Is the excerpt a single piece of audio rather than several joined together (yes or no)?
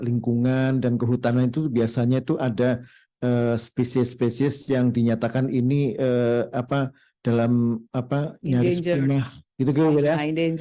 yes